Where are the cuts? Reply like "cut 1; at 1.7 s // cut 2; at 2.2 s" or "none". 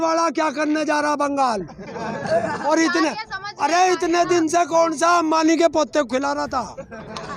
cut 1; at 2.6 s

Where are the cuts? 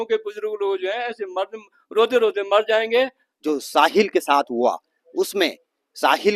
cut 1; at 3.3 s

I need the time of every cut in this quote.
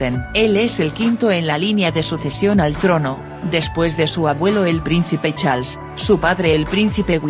cut 1; at 4.4 s

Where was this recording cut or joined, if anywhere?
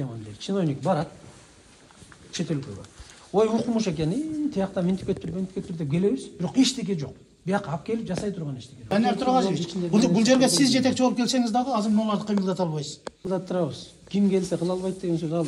cut 1; at 8.9 s // cut 2; at 13.3 s

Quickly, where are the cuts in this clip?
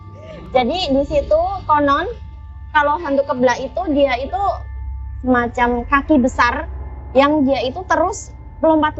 cut 1; at 4.9 s

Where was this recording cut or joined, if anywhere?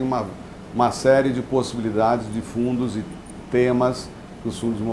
none

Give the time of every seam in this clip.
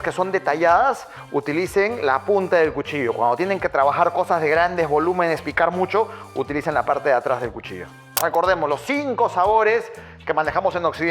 cut 1; at 8.2 s

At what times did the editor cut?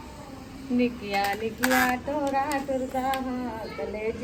none

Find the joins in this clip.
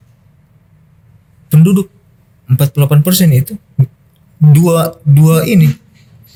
none

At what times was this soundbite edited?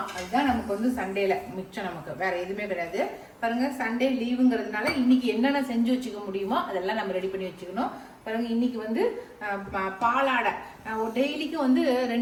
none

